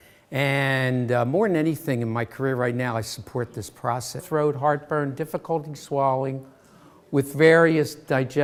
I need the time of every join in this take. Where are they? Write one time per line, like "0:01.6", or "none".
none